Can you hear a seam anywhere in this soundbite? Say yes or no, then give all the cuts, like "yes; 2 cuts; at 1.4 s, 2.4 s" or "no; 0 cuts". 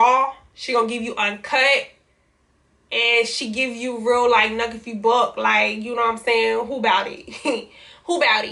no; 0 cuts